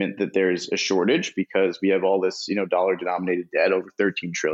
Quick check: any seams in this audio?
no; 0 cuts

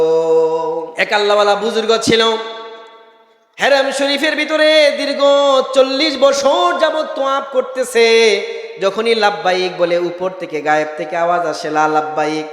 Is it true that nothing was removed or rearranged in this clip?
no; 1 cut; at 0.9 s

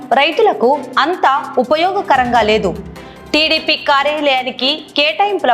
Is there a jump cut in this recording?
no; 0 cuts

